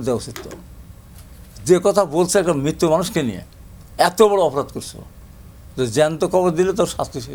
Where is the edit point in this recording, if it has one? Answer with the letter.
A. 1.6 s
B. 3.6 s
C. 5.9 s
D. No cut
D